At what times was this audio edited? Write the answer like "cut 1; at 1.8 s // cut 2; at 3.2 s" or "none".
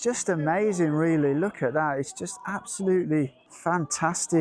cut 1; at 3.4 s